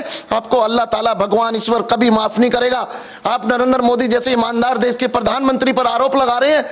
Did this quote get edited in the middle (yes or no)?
no